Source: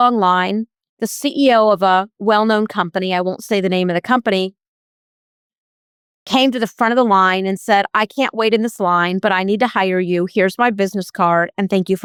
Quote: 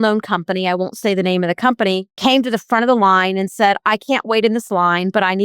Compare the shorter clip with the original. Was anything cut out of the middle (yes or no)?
yes